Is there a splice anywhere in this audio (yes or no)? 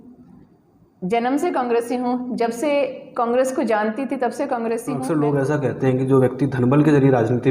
yes